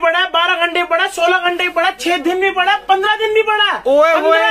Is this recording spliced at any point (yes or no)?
no